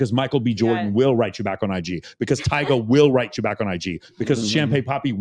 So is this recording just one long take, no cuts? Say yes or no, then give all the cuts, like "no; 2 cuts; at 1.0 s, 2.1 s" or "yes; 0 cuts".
yes; 0 cuts